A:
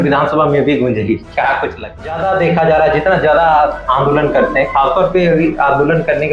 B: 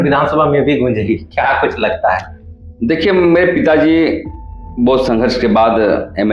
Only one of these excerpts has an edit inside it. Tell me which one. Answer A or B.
A